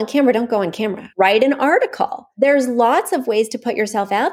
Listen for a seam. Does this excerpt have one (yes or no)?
yes